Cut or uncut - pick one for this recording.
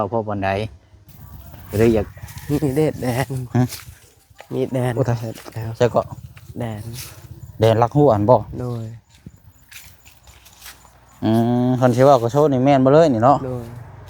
cut